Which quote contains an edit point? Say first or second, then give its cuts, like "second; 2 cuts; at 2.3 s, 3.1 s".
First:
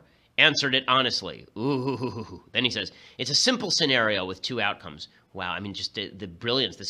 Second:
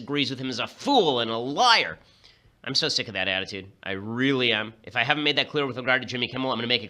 second; 1 cut; at 1.1 s